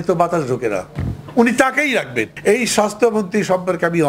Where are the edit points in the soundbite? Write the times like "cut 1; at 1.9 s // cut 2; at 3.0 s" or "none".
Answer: cut 1; at 2.3 s